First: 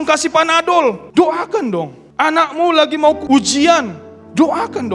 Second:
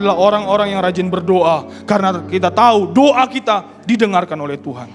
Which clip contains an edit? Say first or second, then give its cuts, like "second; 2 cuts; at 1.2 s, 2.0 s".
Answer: first; 3 cuts; at 1.0 s, 2.0 s, 3.2 s